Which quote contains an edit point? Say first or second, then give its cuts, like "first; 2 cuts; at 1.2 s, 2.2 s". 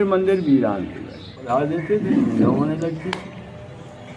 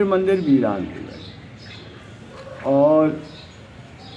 first; 1 cut; at 1.4 s